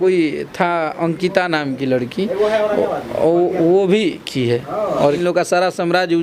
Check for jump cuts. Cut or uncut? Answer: cut